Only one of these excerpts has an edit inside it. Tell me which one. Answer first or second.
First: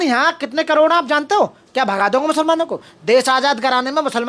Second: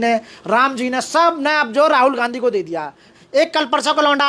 second